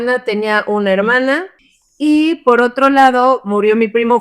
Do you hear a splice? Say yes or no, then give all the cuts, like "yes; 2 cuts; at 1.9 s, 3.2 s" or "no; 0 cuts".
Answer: yes; 1 cut; at 1.6 s